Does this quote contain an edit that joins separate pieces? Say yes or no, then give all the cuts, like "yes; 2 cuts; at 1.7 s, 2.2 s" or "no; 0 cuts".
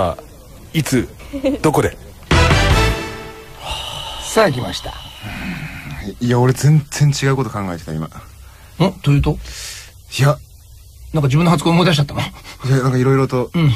no; 0 cuts